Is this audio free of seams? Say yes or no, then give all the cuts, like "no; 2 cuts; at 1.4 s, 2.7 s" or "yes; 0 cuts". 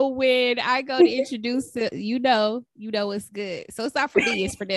yes; 0 cuts